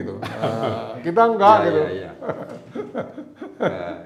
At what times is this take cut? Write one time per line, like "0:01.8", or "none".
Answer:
none